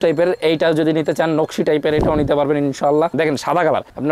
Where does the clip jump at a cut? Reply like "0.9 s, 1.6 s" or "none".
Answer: 3.1 s